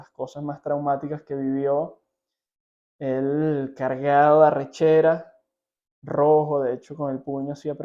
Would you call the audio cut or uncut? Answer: uncut